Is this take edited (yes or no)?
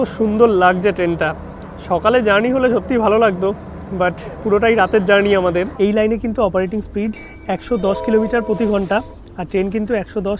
yes